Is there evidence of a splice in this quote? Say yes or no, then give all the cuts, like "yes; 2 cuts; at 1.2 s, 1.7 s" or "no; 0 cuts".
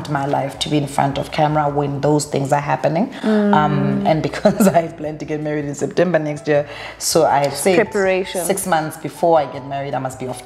no; 0 cuts